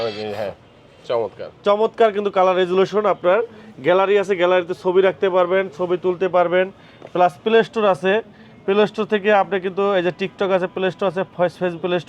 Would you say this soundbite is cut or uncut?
uncut